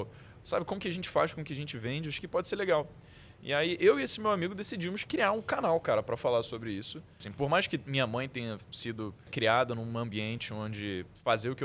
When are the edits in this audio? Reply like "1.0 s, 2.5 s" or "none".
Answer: 7.3 s, 9.3 s